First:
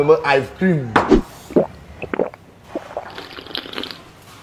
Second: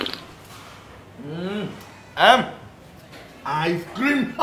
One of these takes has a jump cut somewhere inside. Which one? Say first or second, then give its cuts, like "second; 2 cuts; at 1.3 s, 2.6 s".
first; 1 cut; at 1.1 s